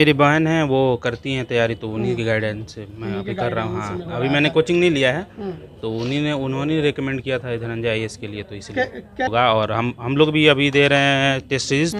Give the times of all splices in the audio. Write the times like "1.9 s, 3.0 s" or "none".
9.3 s